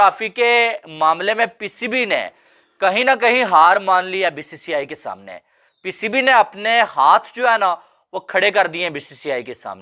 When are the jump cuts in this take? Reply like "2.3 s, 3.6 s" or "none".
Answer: none